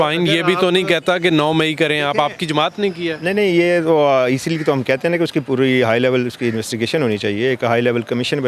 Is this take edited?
no; 0 cuts

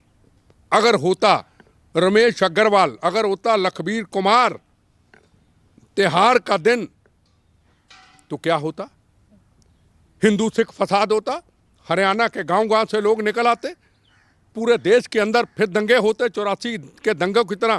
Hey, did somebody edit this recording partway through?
no; 0 cuts

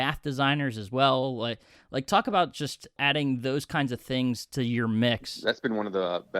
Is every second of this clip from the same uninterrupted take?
no; 2 cuts; at 3.0 s, 5.3 s

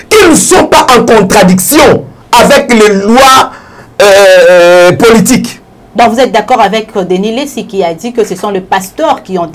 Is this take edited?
no; 0 cuts

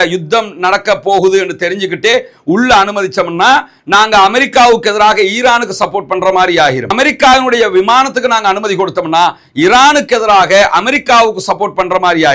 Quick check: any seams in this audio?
no; 0 cuts

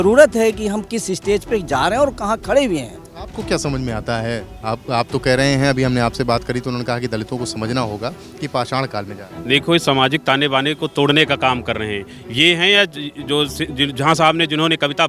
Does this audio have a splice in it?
no; 0 cuts

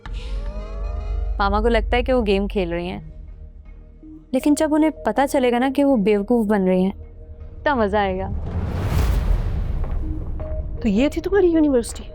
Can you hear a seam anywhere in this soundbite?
yes; 1 cut; at 1.0 s

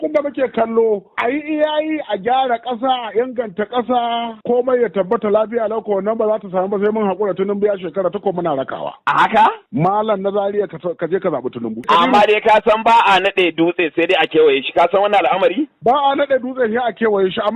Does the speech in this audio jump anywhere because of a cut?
yes; 3 cuts; at 1.1 s, 9.6 s, 11.8 s

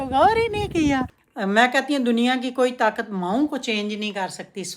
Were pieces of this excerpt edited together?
yes; 1 cut; at 1.1 s

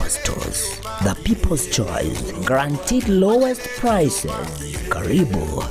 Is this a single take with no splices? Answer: no; 1 cut; at 4.0 s

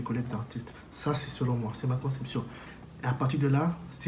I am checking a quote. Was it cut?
yes; 1 cut; at 2.6 s

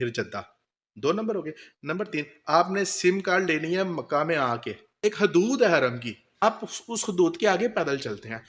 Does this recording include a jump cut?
yes; 2 cuts; at 4.9 s, 6.4 s

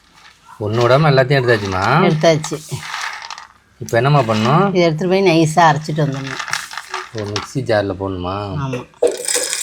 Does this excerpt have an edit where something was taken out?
no; 0 cuts

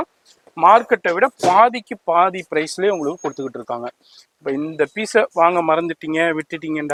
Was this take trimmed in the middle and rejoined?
no; 0 cuts

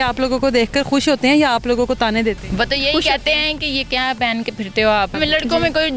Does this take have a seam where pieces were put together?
yes; 2 cuts; at 2.4 s, 5.1 s

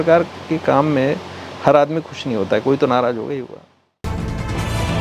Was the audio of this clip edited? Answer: yes; 1 cut; at 4.0 s

